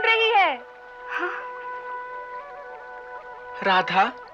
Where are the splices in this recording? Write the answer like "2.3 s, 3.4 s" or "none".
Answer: none